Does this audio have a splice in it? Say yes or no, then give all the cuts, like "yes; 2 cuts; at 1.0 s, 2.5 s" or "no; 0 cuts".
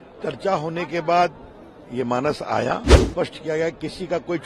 yes; 1 cut; at 3.0 s